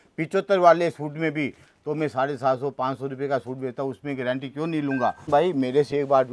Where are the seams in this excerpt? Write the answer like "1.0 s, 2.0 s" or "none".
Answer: 5.3 s

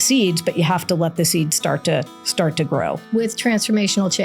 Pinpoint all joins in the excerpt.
3.1 s

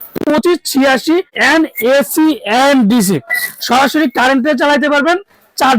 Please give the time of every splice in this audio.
1.3 s

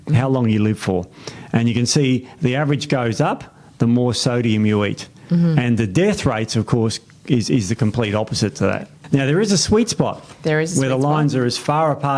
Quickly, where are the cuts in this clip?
8.9 s

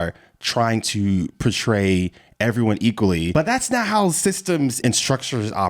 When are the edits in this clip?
3.3 s, 4.8 s

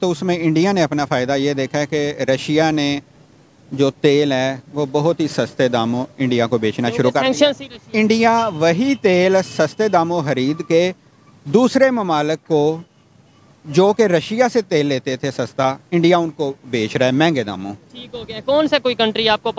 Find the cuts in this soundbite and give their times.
none

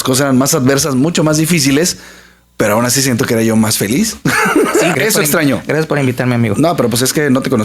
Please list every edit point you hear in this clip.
4.9 s

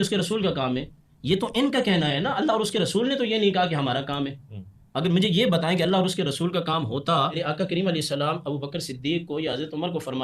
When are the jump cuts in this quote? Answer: 7.4 s

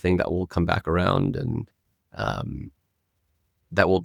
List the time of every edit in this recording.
none

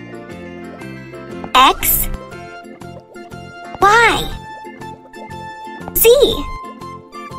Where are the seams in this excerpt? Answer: 2.2 s, 3.7 s, 4.3 s, 5.7 s

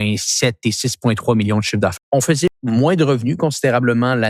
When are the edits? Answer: 2.2 s

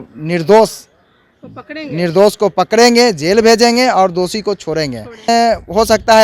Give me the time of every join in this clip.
5.3 s

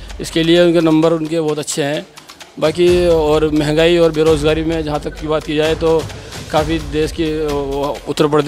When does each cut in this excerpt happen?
none

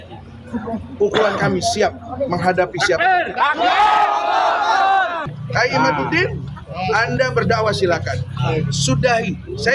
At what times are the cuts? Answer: 5.3 s

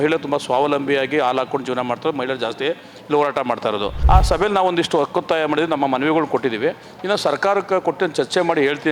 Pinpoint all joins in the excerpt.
3.9 s

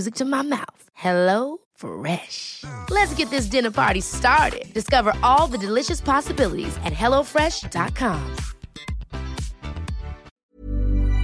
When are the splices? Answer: 10.3 s

